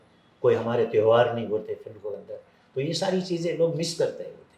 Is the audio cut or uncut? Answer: uncut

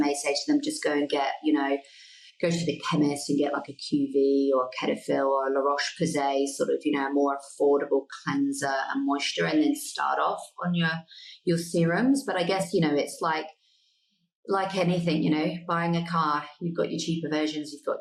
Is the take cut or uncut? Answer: uncut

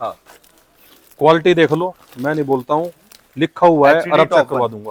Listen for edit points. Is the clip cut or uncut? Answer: uncut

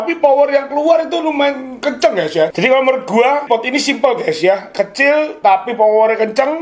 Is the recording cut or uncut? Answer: cut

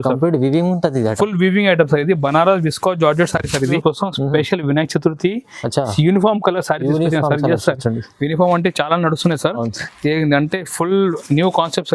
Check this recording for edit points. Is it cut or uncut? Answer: cut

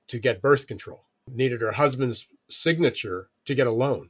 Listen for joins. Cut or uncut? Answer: cut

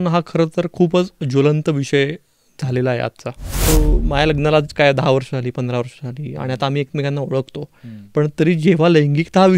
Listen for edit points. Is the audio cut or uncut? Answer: cut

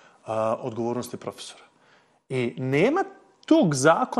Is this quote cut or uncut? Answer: uncut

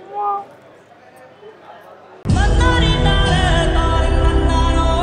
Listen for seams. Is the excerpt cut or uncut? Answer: uncut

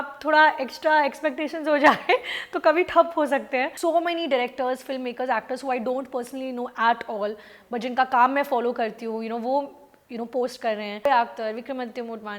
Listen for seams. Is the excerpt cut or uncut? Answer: cut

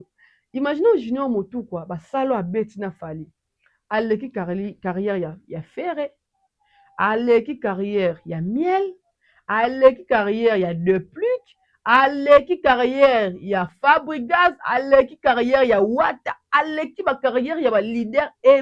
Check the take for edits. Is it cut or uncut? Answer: uncut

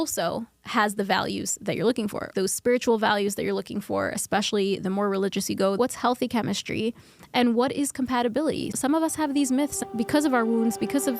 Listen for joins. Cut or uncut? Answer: cut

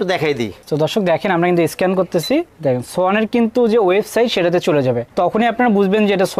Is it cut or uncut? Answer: uncut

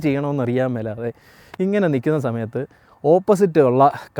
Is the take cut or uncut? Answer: uncut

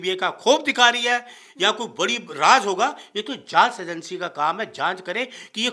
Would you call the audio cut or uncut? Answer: uncut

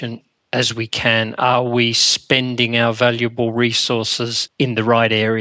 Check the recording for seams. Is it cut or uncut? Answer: cut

